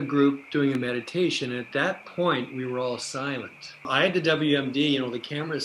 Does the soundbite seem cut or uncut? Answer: cut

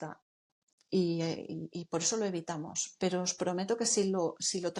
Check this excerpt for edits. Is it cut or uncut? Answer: uncut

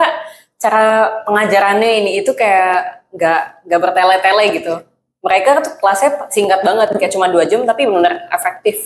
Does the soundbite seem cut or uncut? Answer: uncut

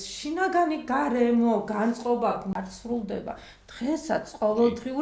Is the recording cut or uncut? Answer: cut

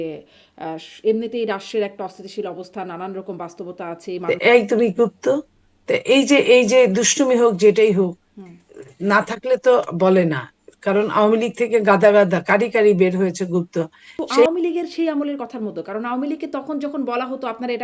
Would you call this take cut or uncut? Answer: cut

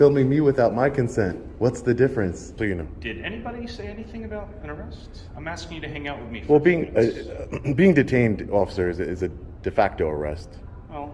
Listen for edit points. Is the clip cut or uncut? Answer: cut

